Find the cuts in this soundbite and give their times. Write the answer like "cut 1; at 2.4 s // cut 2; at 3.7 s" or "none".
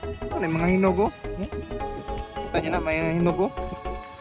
none